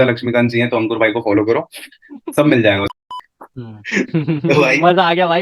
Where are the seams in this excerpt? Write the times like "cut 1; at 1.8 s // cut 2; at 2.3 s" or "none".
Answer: cut 1; at 3.0 s